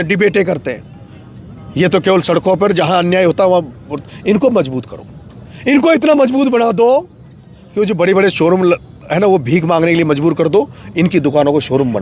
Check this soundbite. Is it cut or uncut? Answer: uncut